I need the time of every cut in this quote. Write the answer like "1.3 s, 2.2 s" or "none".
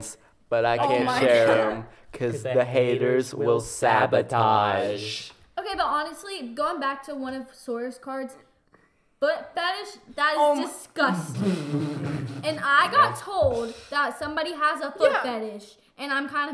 none